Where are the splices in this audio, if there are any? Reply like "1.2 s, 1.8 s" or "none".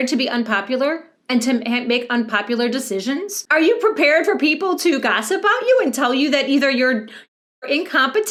none